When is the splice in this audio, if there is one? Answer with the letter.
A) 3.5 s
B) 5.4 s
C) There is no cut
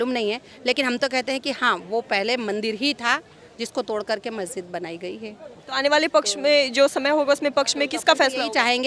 C